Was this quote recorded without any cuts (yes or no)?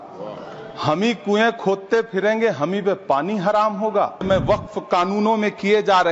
no